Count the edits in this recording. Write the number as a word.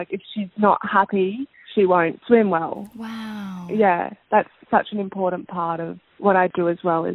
zero